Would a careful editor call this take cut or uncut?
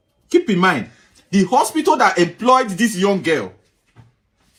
uncut